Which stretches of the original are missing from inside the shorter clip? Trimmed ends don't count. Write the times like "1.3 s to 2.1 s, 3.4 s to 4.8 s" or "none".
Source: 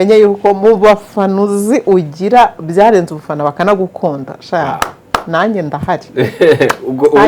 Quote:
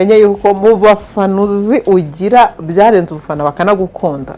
none